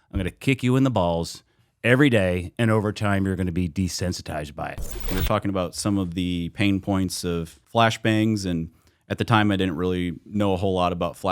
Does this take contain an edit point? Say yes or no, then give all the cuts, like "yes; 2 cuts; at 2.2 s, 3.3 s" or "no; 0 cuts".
yes; 2 cuts; at 5.1 s, 7.5 s